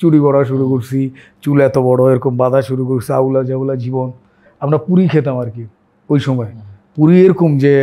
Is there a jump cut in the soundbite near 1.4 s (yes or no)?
no